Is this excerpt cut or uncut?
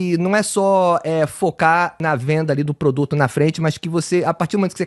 cut